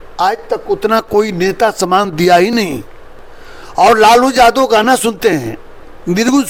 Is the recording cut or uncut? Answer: uncut